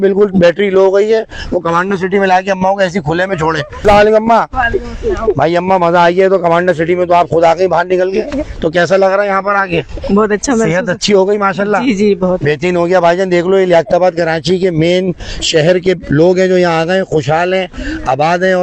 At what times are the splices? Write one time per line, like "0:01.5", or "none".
0:03.8